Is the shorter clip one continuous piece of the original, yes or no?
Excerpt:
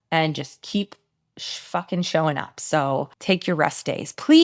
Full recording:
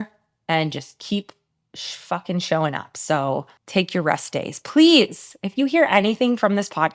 no